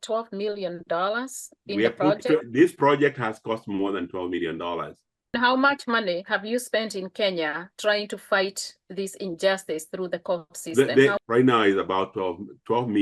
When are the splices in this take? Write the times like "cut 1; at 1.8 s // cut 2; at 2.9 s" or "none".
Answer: cut 1; at 5.2 s